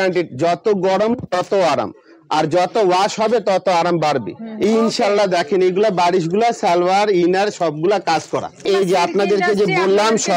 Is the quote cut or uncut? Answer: cut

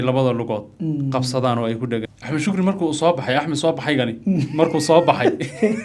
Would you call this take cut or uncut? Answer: cut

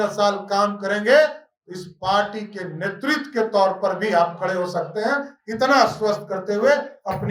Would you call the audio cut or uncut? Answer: uncut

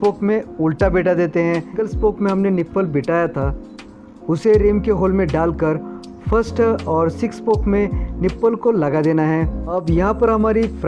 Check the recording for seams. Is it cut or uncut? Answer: cut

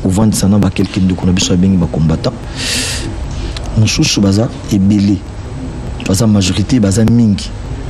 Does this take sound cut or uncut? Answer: cut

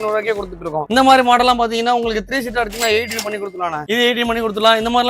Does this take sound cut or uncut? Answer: uncut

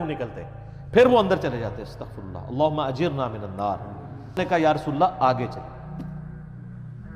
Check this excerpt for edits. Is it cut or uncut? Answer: cut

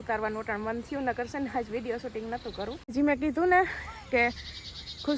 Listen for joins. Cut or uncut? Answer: cut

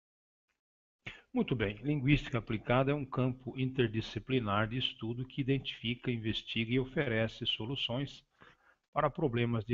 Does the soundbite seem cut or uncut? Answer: cut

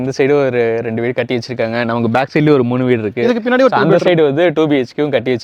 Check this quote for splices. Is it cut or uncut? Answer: uncut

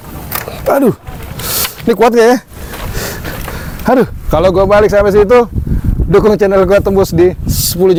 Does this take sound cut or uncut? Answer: uncut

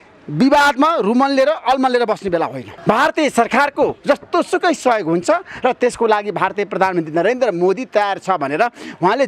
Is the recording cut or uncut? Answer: cut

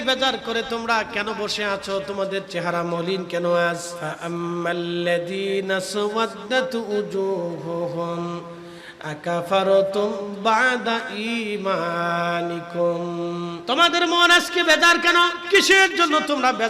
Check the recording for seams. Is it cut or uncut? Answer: cut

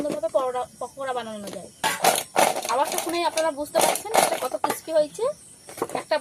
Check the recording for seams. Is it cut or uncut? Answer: uncut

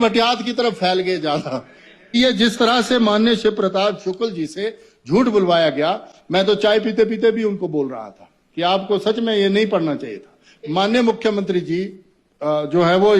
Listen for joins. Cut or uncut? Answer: cut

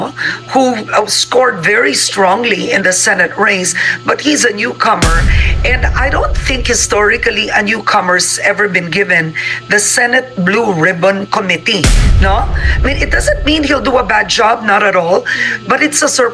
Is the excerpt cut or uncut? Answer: uncut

